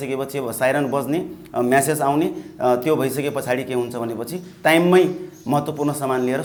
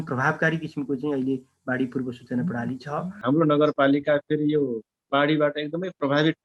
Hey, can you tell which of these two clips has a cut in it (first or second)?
second